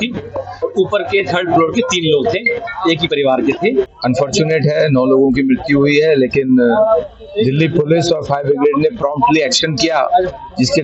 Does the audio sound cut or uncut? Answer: cut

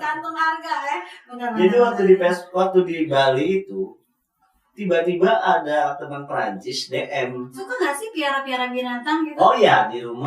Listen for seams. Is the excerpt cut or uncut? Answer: cut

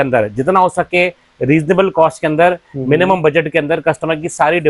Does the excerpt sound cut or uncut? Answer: uncut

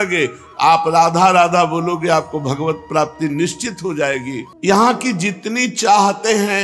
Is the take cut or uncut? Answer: cut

